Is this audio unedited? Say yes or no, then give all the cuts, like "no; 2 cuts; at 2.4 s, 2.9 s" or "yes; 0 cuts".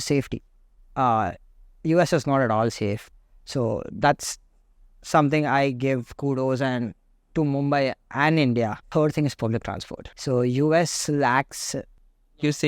no; 2 cuts; at 3.0 s, 8.8 s